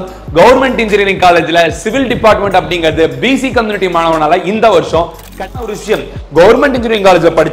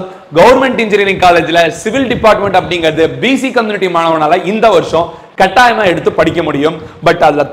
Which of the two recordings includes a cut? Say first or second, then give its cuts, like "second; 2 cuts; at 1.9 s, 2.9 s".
first; 1 cut; at 5.6 s